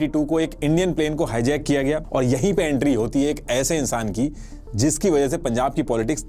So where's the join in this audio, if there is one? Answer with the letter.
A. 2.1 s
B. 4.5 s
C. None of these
A